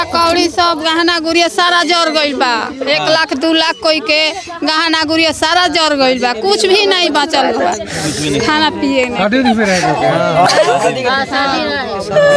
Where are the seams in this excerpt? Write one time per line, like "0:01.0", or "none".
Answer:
none